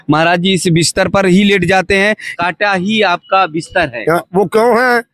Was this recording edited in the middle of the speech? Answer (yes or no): yes